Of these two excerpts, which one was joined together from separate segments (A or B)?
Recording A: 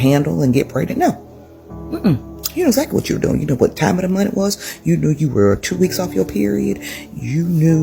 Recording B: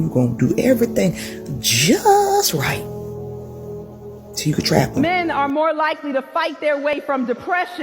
B